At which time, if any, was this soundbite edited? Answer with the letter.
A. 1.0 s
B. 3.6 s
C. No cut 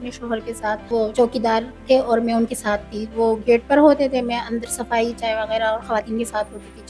A